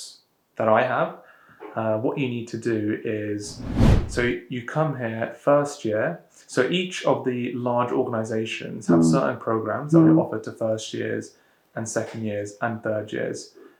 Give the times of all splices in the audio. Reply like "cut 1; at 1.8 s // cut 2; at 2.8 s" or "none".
none